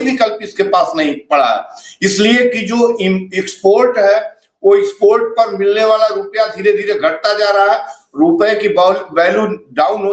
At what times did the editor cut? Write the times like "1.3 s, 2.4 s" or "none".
none